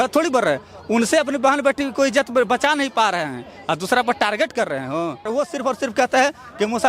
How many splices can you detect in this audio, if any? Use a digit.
1